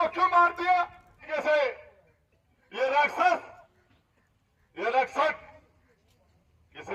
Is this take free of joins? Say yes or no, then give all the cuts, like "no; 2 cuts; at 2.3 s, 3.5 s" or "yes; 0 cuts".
no; 1 cut; at 1.5 s